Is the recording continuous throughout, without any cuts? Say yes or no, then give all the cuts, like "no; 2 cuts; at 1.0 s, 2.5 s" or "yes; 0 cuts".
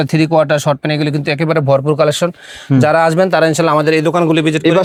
yes; 0 cuts